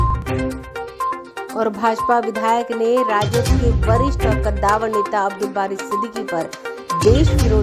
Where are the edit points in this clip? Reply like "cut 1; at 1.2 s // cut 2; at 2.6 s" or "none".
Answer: cut 1; at 1.1 s

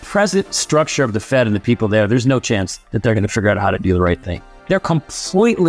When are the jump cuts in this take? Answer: cut 1; at 2.8 s // cut 2; at 4.5 s

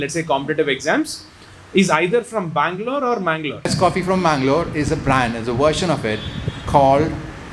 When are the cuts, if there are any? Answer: cut 1; at 3.7 s

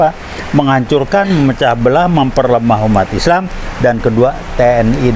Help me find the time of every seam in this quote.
none

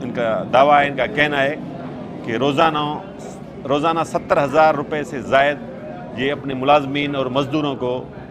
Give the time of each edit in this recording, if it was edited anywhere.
none

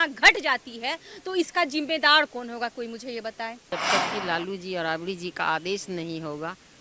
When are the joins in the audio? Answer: cut 1; at 3.6 s

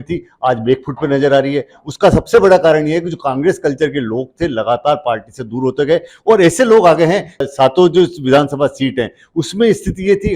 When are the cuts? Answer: cut 1; at 7.4 s

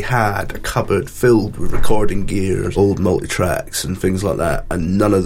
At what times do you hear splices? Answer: cut 1; at 2.7 s

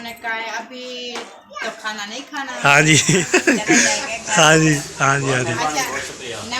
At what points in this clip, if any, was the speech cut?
cut 1; at 3.2 s

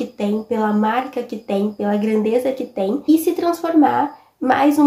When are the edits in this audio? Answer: cut 1; at 3.0 s

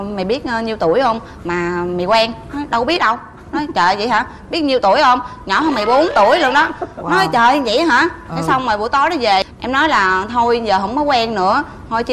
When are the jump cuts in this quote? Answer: none

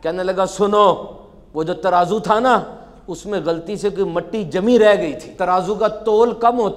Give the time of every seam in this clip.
cut 1; at 5.2 s

